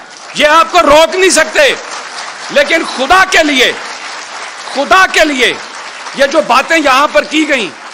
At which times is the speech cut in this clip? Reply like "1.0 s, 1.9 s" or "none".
none